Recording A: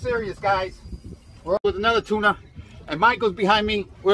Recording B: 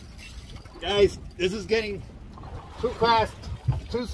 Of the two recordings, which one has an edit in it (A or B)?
A